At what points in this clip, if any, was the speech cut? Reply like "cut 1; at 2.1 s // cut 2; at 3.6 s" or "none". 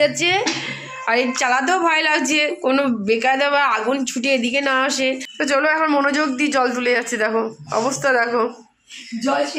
cut 1; at 5.3 s